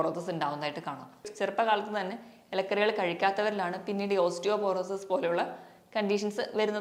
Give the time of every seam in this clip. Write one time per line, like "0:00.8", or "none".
0:01.3

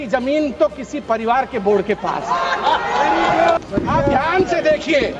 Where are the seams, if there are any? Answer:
0:03.6

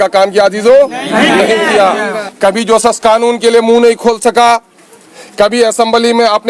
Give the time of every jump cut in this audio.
0:02.2

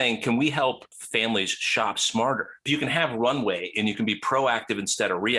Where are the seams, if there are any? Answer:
0:00.9
0:02.6

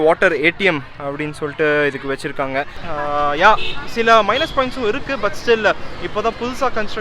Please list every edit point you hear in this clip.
0:02.8

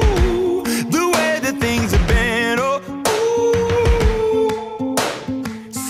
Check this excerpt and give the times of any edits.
none

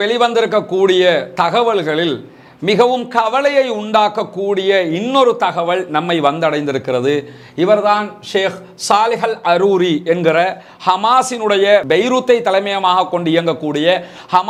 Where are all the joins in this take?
none

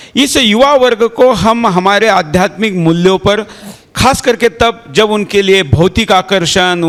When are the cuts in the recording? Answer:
none

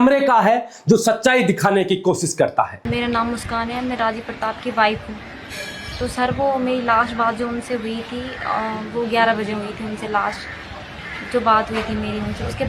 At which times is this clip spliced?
none

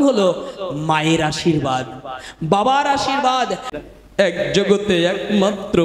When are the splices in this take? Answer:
0:03.7

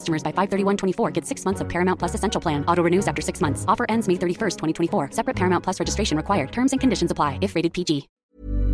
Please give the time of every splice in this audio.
none

